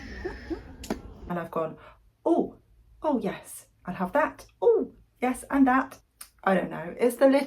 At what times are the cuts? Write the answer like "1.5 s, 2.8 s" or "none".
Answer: 1.1 s, 6.0 s